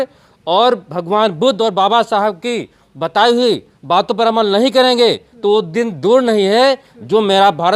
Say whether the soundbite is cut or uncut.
uncut